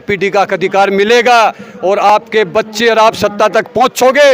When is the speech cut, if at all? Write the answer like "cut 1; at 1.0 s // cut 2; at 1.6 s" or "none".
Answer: none